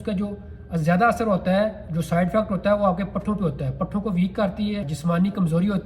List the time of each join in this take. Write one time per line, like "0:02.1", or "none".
0:04.9